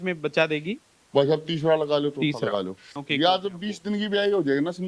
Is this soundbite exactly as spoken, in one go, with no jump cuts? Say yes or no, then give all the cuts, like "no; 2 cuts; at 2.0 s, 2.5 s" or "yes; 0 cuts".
no; 1 cut; at 2.7 s